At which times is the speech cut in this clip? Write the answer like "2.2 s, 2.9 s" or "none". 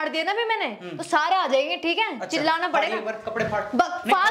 none